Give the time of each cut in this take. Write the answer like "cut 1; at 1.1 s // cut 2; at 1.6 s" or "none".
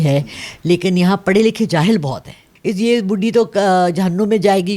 cut 1; at 2.5 s